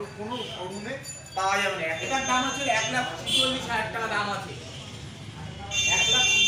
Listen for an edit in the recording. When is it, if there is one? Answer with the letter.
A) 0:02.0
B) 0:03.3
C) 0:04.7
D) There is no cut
A